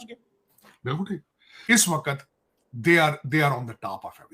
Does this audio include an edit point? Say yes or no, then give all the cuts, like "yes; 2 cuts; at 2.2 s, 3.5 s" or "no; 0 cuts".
yes; 1 cut; at 1.5 s